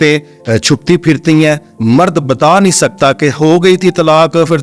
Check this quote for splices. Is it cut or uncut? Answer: uncut